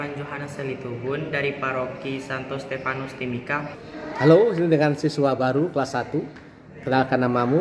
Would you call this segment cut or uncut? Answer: cut